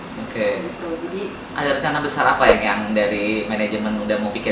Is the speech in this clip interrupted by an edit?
yes; 1 cut; at 1.4 s

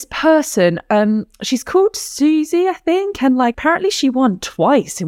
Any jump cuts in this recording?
yes; 1 cut; at 3.6 s

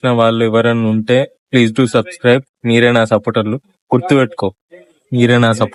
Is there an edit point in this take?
no; 0 cuts

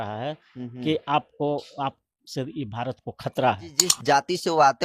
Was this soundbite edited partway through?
yes; 1 cut; at 4.0 s

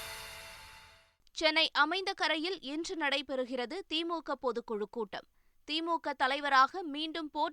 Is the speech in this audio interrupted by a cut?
yes; 1 cut; at 1.0 s

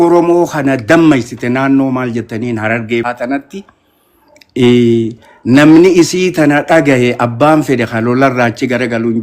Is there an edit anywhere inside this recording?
yes; 1 cut; at 3.0 s

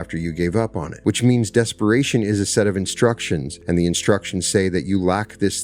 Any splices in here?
yes; 2 cuts; at 0.9 s, 3.5 s

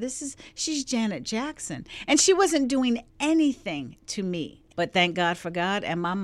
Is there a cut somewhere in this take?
yes; 1 cut; at 4.6 s

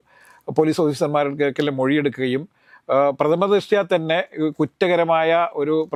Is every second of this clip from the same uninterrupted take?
yes; 0 cuts

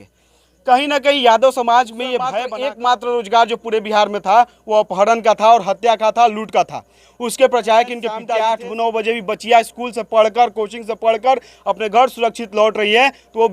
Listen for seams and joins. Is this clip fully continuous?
no; 2 cuts; at 2.4 s, 8.1 s

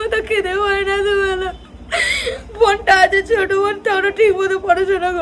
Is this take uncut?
yes; 0 cuts

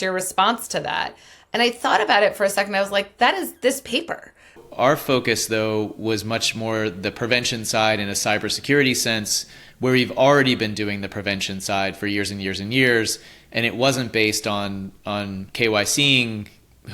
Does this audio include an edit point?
yes; 1 cut; at 4.6 s

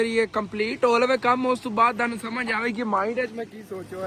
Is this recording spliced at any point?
no; 0 cuts

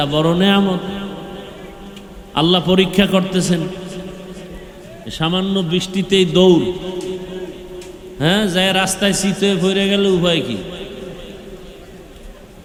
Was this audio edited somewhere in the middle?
no; 0 cuts

